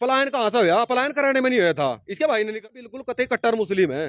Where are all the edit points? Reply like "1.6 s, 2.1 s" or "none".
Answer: 2.7 s